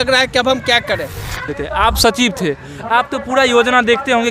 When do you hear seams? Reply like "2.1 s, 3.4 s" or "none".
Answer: 1.4 s